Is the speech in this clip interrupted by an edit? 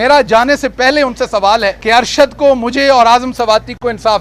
yes; 1 cut; at 1.8 s

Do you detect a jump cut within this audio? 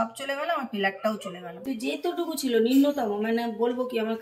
yes; 1 cut; at 1.6 s

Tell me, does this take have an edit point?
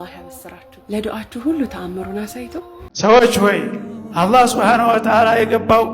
yes; 1 cut; at 2.8 s

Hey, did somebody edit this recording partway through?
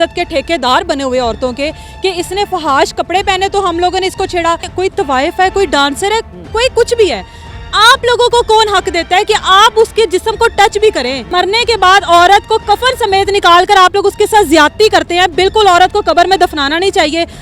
yes; 2 cuts; at 4.7 s, 11.2 s

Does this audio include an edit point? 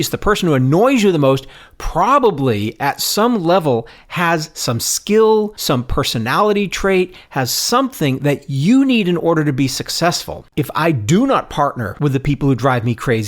yes; 3 cuts; at 5.6 s, 10.4 s, 11.9 s

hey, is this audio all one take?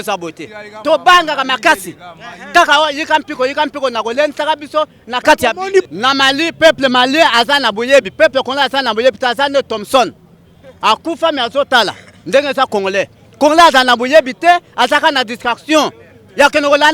no; 1 cut; at 5.8 s

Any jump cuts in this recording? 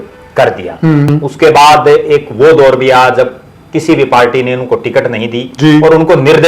yes; 1 cut; at 1.1 s

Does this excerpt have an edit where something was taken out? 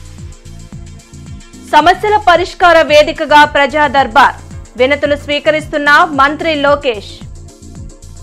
yes; 1 cut; at 1.4 s

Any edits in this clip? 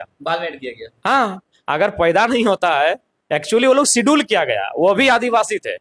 no; 0 cuts

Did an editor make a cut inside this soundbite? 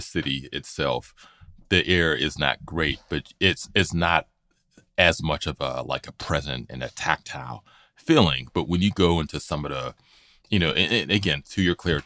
no; 0 cuts

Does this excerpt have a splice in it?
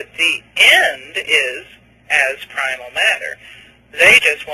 no; 0 cuts

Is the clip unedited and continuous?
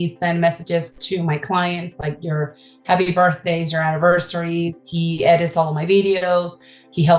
yes; 0 cuts

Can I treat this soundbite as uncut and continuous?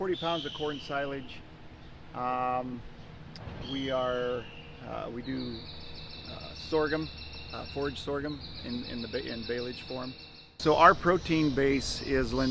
no; 1 cut; at 10.5 s

